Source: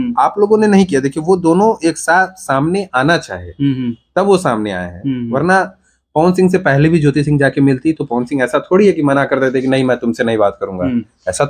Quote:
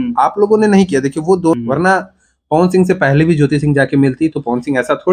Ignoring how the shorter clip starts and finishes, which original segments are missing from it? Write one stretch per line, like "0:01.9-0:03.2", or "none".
0:01.5-0:05.2